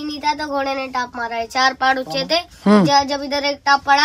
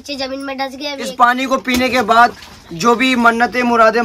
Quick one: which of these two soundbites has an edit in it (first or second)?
second